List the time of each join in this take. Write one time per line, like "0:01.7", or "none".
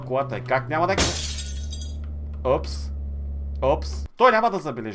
0:04.0

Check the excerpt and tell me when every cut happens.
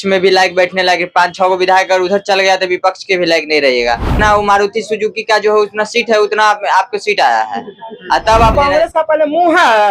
0:04.2
0:08.5

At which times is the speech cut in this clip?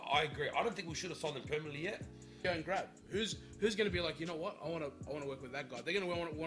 0:02.4

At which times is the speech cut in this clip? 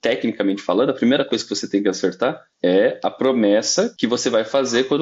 0:02.5
0:03.9

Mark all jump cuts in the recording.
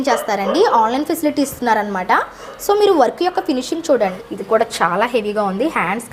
0:04.1

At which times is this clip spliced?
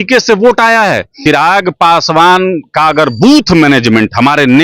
0:01.2

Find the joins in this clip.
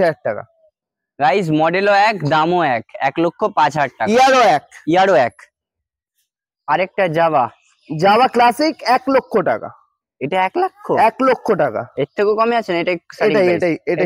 none

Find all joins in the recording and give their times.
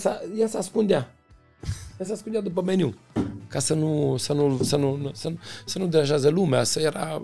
none

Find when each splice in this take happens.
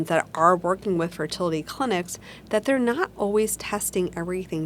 none

